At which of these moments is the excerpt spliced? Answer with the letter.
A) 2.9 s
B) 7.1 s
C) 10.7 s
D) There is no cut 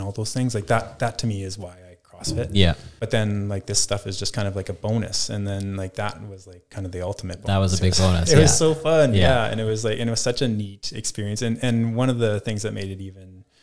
A